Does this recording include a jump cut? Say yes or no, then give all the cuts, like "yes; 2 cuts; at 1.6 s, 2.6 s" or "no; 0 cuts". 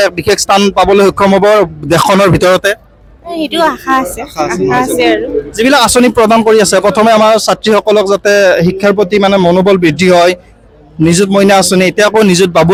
no; 0 cuts